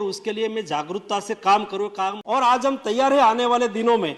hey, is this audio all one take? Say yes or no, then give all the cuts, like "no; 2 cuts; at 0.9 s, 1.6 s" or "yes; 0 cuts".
no; 1 cut; at 2.2 s